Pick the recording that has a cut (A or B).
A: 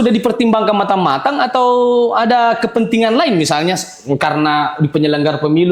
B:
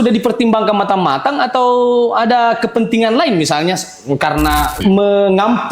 B